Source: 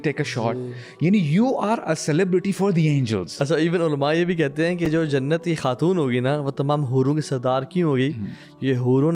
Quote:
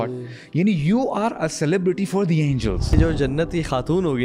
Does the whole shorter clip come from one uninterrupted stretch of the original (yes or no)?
no